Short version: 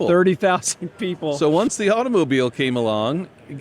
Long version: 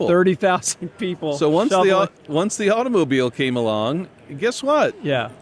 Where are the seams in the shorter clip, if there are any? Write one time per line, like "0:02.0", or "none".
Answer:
0:01.7